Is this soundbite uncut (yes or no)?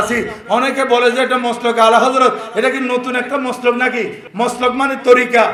yes